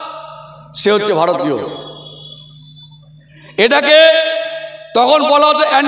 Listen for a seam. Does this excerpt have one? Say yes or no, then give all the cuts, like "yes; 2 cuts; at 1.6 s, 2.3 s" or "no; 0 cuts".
no; 0 cuts